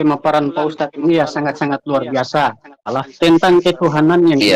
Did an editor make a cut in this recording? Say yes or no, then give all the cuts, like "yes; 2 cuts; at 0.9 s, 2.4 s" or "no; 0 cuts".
yes; 1 cut; at 2.9 s